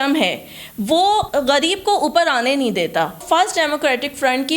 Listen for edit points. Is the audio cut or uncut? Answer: cut